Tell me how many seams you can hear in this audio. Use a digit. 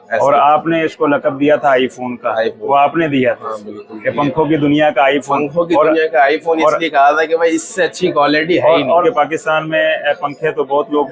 1